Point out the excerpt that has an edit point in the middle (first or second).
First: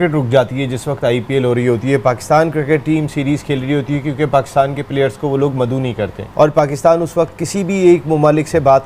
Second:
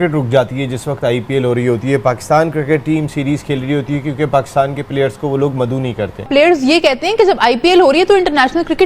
second